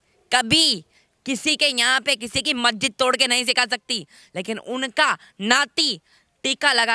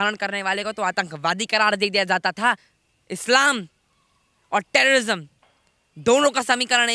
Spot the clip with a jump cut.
second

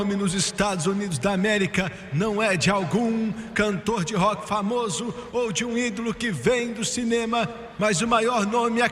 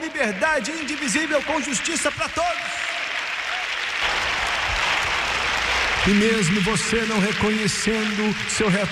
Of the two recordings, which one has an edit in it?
second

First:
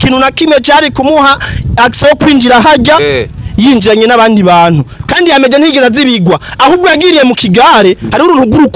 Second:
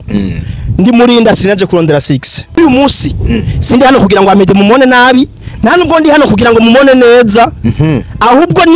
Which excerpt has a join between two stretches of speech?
second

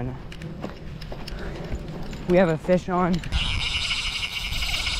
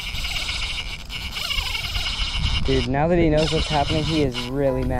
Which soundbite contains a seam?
first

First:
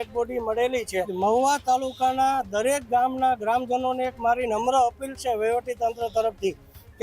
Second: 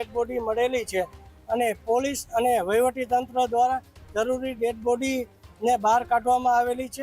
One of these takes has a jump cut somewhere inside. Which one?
first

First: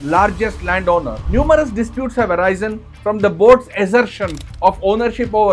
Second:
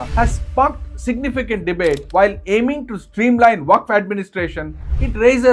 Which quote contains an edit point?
first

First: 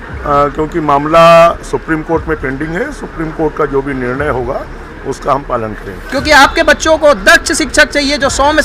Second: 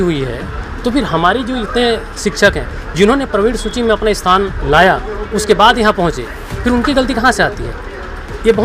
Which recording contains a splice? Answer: first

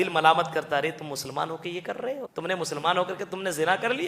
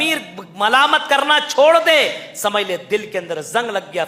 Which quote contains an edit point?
first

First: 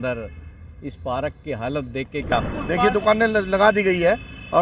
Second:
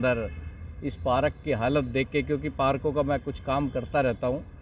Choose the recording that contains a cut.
first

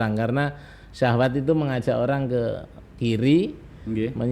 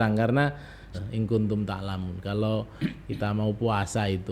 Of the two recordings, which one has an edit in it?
second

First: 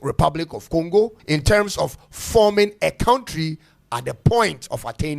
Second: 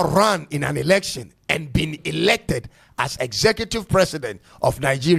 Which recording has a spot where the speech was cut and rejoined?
first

